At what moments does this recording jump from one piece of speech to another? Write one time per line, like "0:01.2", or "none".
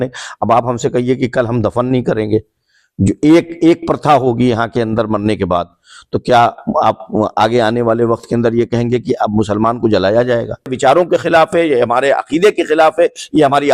0:10.7

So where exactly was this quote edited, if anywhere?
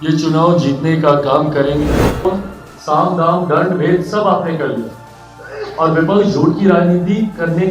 0:02.2

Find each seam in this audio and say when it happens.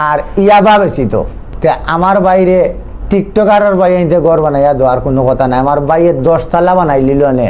0:01.4

